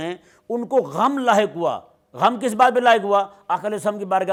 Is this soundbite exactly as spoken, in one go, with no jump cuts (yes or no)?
yes